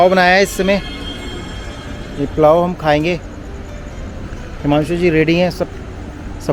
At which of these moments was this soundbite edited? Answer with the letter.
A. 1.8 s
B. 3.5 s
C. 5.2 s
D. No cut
D